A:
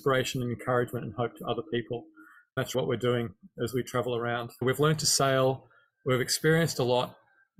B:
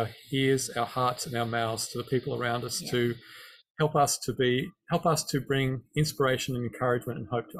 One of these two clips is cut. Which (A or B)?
A